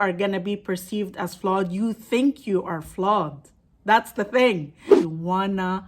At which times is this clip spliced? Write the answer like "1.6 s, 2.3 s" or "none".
4.9 s